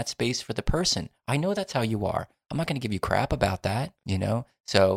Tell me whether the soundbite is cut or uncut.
cut